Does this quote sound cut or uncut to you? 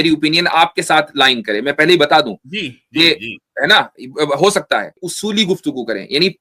cut